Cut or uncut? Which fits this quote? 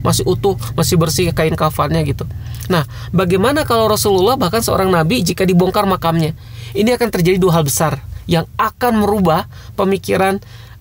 uncut